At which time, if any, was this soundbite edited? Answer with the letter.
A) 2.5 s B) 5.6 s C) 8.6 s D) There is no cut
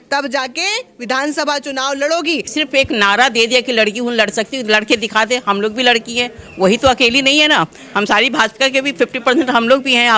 A